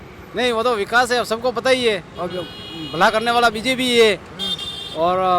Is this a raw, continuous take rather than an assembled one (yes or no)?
yes